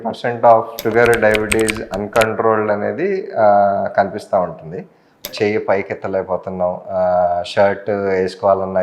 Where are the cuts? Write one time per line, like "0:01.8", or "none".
0:05.3